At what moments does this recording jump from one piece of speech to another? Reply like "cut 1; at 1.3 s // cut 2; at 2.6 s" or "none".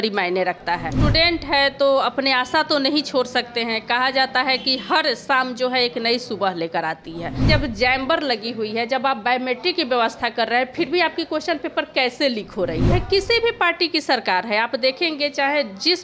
cut 1; at 0.9 s // cut 2; at 7.5 s // cut 3; at 12.9 s